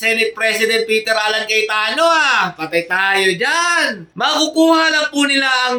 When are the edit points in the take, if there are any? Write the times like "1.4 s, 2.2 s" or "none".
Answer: none